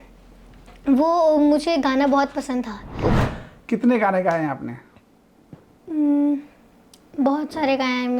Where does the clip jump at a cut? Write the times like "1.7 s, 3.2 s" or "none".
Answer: 3.2 s